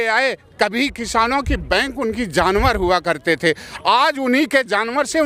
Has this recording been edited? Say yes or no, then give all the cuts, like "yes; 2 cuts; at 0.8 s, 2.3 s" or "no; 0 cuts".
no; 0 cuts